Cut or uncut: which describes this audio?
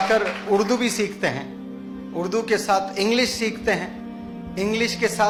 uncut